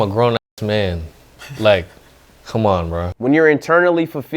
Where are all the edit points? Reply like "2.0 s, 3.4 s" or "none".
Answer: 3.1 s